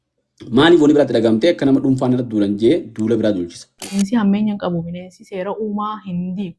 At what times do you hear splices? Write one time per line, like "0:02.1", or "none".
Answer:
0:04.0